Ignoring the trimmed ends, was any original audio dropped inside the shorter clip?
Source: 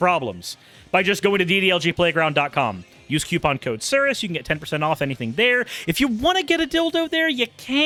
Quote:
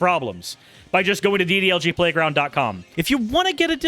yes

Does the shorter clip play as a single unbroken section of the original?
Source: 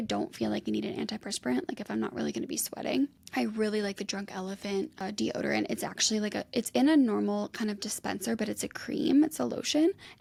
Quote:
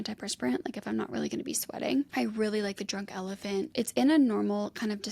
no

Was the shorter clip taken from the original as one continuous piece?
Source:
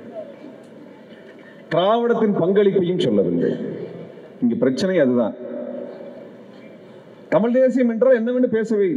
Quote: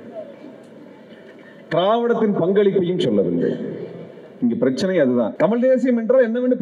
no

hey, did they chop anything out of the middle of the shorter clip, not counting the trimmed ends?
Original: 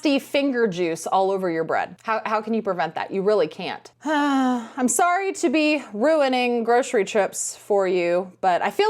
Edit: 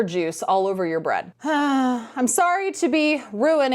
yes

